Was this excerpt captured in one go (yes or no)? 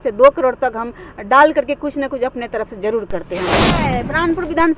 no